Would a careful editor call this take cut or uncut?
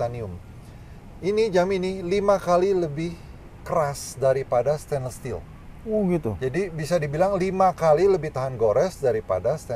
uncut